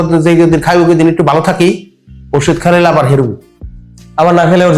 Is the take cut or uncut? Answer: uncut